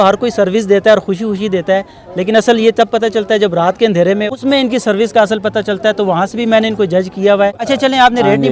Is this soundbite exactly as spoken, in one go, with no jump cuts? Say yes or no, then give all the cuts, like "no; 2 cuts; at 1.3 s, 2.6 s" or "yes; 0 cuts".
no; 2 cuts; at 4.2 s, 7.6 s